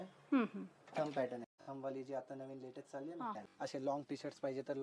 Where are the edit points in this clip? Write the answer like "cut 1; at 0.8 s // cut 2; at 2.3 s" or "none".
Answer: cut 1; at 1.5 s // cut 2; at 3.4 s